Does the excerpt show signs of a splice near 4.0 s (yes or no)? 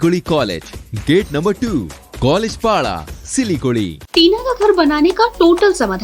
yes